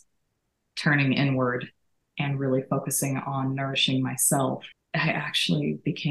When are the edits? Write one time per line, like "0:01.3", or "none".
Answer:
0:04.7